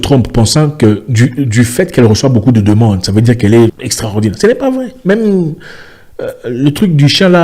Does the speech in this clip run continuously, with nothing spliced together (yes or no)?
no